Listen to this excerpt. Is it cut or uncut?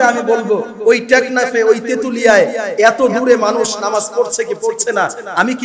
uncut